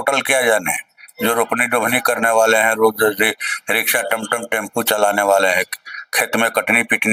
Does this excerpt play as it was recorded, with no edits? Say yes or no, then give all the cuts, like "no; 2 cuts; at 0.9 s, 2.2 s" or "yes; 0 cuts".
yes; 0 cuts